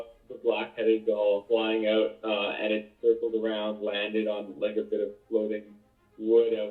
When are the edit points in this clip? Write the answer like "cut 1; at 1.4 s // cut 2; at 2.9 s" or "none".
none

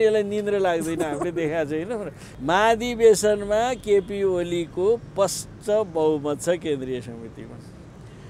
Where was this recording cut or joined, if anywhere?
cut 1; at 2.2 s

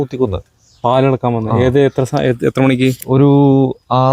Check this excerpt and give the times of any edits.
none

